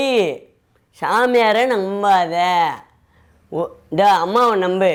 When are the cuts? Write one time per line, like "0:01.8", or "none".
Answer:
none

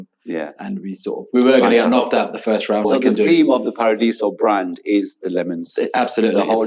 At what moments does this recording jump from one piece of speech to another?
0:02.9

